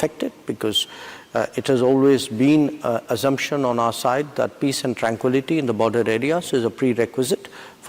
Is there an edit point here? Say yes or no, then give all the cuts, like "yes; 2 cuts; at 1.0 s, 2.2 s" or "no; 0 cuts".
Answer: no; 0 cuts